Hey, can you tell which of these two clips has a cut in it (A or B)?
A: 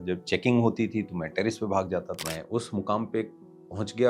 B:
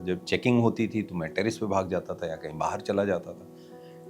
A